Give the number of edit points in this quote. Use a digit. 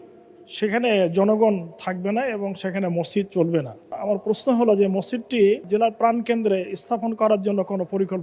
2